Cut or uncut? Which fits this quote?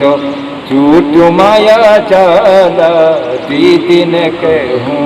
uncut